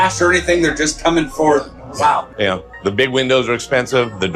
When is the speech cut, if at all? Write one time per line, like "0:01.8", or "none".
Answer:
none

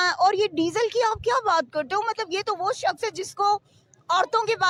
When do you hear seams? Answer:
none

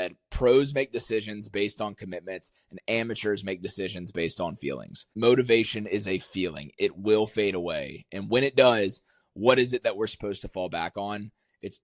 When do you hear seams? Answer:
0:05.1

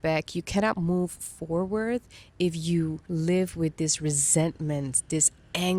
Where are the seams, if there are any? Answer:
0:03.0

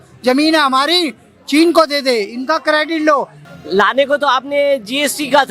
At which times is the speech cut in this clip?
0:03.4

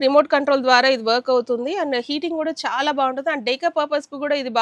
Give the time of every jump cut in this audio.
none

